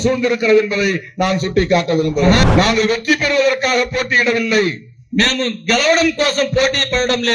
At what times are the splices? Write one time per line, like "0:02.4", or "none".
0:02.5